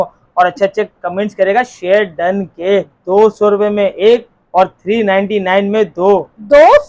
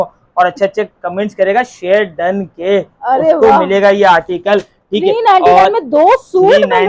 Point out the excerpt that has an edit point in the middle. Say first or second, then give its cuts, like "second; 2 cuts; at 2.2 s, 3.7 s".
first; 1 cut; at 2.9 s